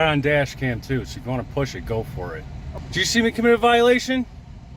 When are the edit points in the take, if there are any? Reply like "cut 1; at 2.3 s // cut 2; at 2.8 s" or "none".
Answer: cut 1; at 2.7 s